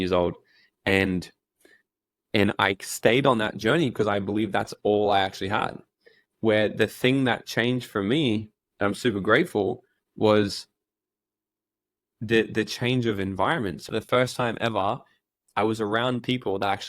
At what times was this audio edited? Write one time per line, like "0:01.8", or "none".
0:13.8